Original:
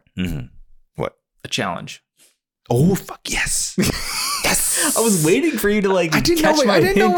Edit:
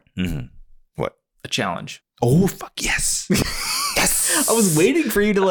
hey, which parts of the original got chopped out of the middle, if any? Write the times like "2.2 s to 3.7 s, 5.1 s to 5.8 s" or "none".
2.0 s to 2.5 s